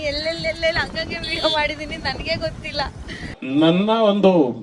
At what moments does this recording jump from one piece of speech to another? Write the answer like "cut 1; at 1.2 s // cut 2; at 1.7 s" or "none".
cut 1; at 3.3 s